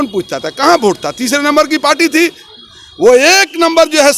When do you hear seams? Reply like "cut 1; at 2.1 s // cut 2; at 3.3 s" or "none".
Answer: none